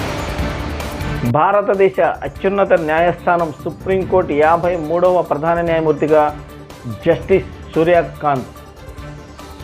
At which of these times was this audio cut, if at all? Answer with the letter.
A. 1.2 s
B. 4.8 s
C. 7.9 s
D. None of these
A